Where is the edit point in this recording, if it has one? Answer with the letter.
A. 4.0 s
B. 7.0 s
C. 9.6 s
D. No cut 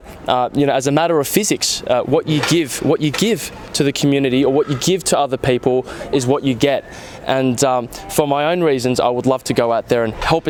D